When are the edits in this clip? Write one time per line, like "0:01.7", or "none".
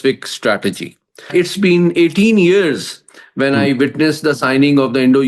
0:01.3